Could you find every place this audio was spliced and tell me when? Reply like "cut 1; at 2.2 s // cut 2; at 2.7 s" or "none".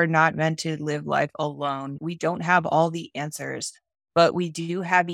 cut 1; at 2.0 s